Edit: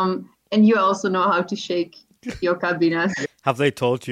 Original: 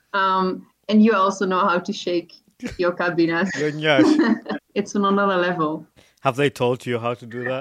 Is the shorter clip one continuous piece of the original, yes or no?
no